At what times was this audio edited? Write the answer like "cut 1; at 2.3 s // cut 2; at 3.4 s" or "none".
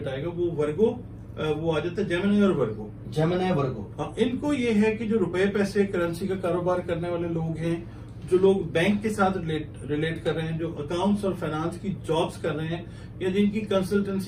none